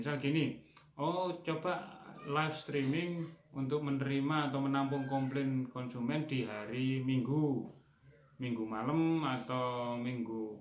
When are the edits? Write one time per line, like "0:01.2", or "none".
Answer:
none